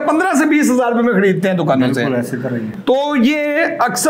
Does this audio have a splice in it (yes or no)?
no